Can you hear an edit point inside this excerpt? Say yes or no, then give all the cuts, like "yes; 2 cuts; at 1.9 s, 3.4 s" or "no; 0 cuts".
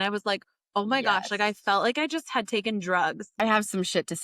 yes; 1 cut; at 3.3 s